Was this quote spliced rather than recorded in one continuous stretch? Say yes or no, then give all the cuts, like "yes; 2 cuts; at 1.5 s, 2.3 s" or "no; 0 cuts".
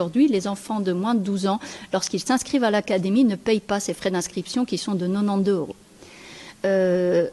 no; 0 cuts